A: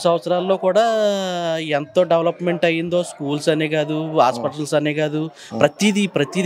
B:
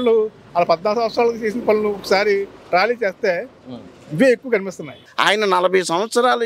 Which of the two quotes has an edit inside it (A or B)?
B